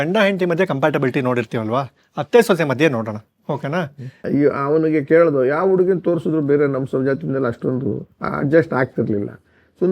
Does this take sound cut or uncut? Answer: cut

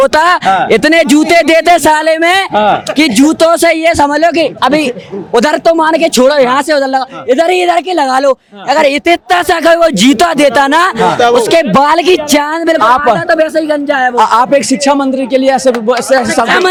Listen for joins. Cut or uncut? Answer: uncut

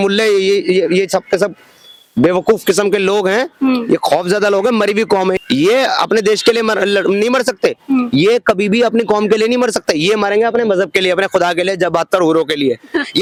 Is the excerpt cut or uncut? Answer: uncut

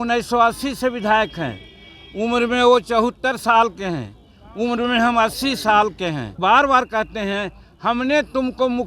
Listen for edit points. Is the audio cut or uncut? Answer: cut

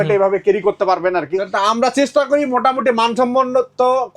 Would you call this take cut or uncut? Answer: cut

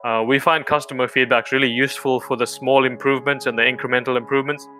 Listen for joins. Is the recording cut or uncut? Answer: uncut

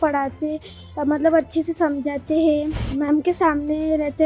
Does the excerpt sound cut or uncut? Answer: cut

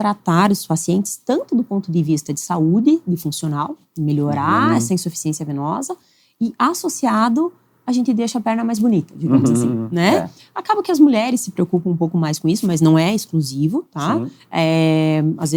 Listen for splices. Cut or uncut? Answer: uncut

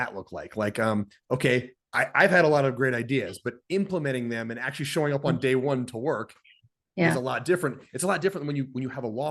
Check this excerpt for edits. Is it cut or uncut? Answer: uncut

